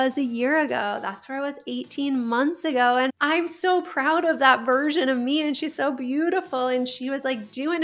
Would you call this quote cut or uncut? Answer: cut